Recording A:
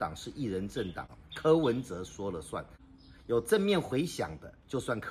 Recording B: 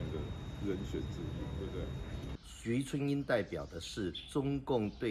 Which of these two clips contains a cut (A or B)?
B